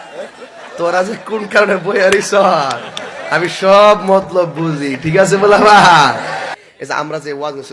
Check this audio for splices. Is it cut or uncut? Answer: cut